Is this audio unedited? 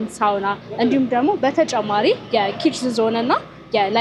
yes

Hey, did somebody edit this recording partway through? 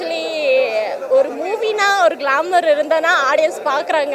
no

